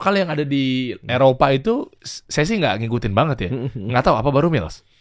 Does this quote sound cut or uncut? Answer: uncut